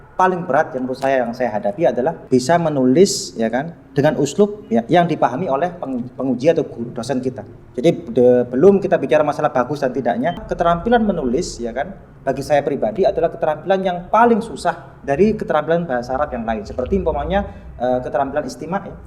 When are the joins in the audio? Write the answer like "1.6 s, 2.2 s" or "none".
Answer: 2.2 s, 10.4 s